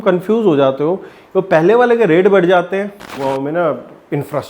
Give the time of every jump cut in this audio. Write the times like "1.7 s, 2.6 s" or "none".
3.2 s